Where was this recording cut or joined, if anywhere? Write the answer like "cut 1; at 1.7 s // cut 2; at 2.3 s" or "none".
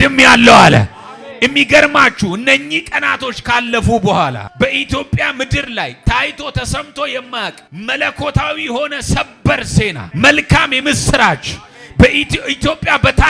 cut 1; at 4.4 s // cut 2; at 7.7 s // cut 3; at 10.0 s